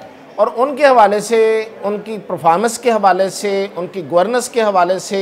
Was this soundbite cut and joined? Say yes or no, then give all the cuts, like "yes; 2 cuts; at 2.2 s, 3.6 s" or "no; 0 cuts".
no; 0 cuts